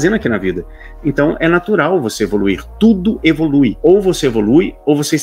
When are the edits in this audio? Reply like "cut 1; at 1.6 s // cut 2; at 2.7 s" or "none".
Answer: cut 1; at 3.8 s